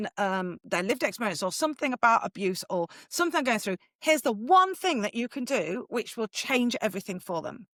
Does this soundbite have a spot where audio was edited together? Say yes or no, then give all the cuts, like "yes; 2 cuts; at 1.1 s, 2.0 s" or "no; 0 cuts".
no; 0 cuts